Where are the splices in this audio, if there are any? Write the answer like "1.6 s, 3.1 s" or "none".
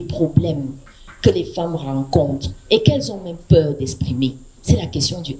none